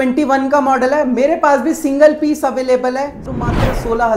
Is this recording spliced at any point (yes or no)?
yes